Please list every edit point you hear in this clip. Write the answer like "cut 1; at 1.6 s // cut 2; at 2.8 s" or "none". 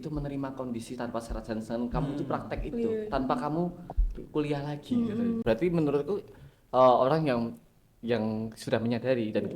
cut 1; at 5.4 s